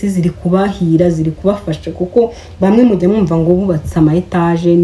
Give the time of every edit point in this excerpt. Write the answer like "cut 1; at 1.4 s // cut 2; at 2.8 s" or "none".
none